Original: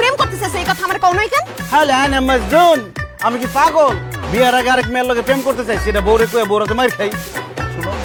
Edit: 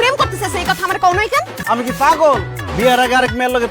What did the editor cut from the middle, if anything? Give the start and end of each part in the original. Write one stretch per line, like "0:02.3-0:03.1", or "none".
0:01.5-0:03.0